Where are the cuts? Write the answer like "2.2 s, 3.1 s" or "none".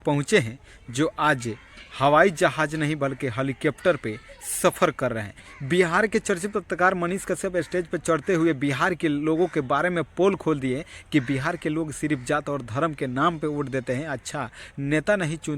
5.5 s